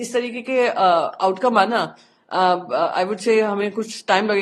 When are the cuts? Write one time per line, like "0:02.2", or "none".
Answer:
none